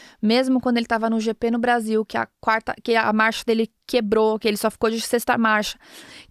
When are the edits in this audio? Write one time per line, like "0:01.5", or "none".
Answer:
none

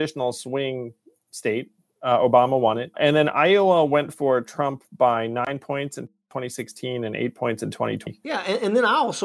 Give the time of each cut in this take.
0:03.0
0:08.1

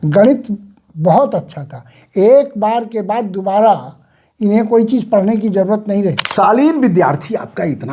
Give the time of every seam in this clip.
0:06.2

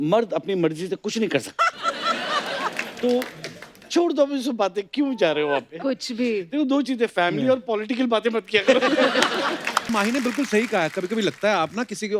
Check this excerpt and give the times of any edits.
0:09.9

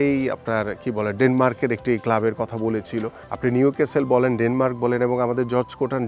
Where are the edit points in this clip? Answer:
0:03.2

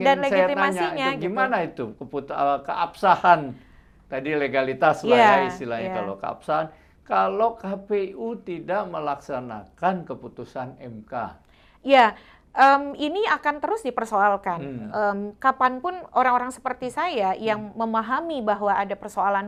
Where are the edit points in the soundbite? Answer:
none

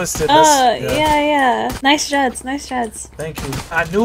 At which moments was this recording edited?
none

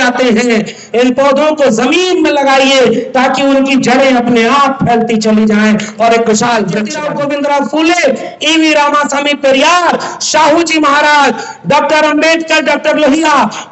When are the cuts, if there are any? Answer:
0:07.0

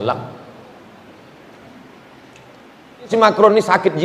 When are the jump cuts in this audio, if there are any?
0:03.1

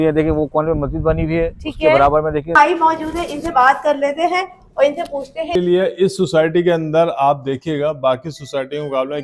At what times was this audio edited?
0:02.6
0:05.6

